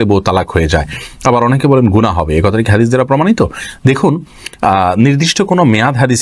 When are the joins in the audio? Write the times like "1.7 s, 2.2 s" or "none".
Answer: none